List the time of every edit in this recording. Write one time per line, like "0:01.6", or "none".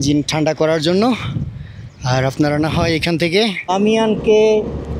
0:03.7